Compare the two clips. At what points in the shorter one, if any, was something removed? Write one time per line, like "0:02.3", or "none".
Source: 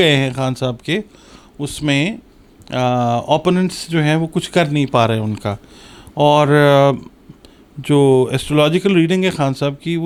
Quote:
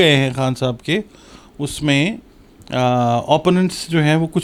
none